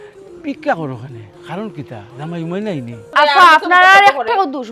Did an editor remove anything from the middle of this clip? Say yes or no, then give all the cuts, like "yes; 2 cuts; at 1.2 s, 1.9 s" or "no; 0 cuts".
yes; 1 cut; at 3.1 s